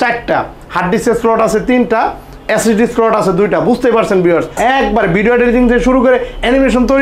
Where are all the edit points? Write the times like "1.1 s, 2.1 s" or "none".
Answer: 4.6 s